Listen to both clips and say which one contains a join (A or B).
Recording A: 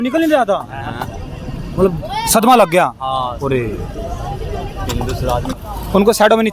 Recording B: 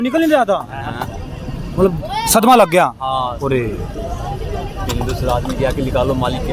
A